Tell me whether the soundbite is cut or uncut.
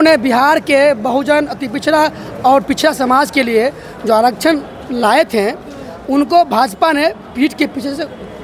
uncut